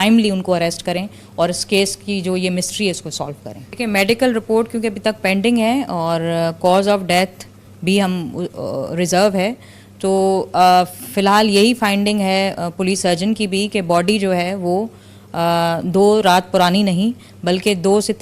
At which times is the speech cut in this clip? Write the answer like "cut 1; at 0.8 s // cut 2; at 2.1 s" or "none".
cut 1; at 3.8 s